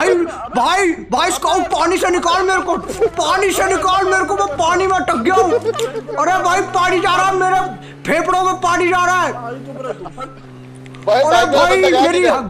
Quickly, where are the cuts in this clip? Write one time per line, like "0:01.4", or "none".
none